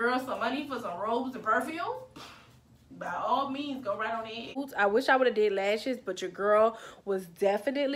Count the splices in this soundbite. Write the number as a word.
one